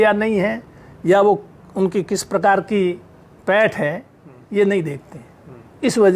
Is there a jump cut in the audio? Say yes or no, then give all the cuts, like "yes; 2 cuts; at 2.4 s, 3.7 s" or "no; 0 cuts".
no; 0 cuts